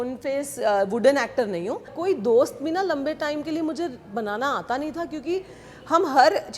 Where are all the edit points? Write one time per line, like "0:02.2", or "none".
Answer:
0:02.0